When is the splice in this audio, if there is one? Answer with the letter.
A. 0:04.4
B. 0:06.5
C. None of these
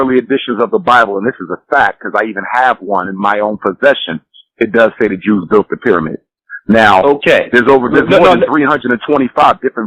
C